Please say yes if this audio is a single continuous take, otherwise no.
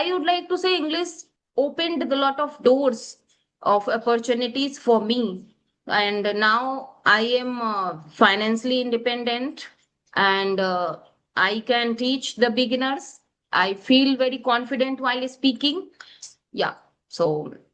no